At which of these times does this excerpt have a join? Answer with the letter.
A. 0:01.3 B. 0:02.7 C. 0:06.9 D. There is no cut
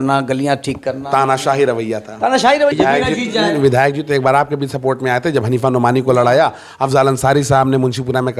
B